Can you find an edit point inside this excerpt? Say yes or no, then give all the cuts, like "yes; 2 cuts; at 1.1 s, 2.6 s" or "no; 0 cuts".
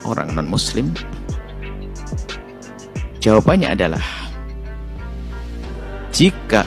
yes; 2 cuts; at 1.2 s, 2.8 s